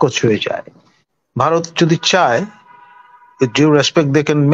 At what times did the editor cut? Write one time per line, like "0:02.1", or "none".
0:01.0